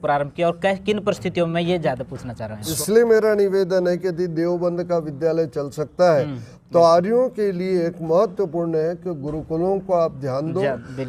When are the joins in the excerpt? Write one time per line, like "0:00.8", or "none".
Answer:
0:02.7

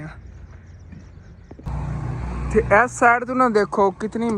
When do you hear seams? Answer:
0:01.6

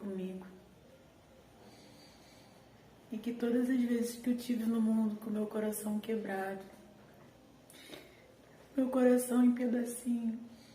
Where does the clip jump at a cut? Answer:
0:01.4
0:07.3

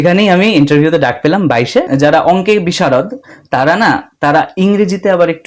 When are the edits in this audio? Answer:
0:01.9

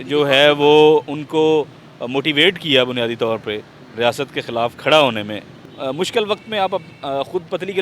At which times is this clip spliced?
0:05.6

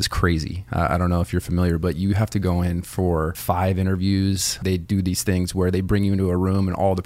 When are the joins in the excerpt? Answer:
0:03.4
0:04.6

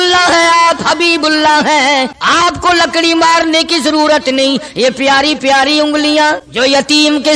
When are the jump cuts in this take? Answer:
0:02.2
0:06.5

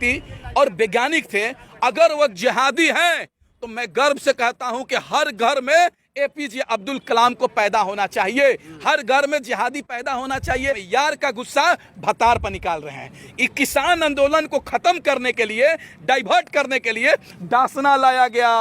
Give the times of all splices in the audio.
0:10.8

